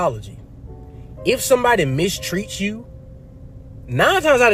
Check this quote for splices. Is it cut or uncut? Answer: uncut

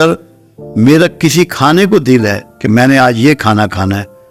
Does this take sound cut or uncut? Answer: uncut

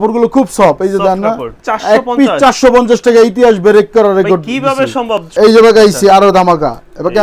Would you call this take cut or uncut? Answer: cut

